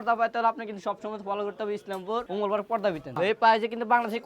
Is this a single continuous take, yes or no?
no